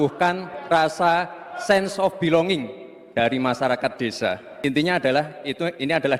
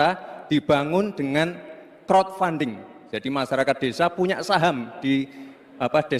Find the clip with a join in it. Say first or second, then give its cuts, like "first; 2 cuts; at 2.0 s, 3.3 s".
first; 1 cut; at 4.5 s